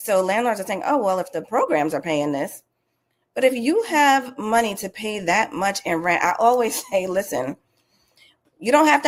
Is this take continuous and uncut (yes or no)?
yes